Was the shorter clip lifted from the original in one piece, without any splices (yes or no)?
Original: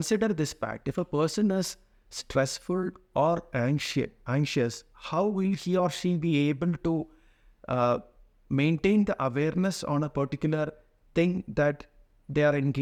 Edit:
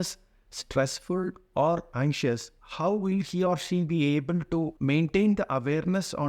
no